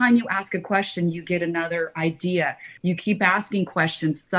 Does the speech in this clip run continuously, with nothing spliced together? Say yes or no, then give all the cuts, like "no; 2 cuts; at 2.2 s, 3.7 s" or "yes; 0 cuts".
no; 1 cut; at 2.7 s